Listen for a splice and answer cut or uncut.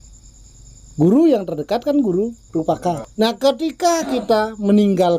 cut